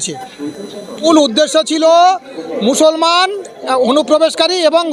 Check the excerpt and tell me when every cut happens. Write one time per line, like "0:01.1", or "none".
0:01.0